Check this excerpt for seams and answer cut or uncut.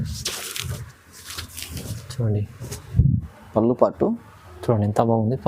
cut